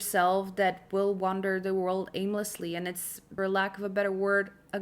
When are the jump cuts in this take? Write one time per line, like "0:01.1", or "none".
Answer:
0:03.3